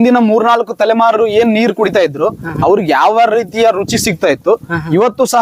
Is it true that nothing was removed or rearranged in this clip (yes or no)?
yes